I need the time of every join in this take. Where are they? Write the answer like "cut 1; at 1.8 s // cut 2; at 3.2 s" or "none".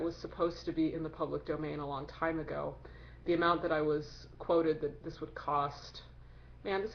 cut 1; at 5.4 s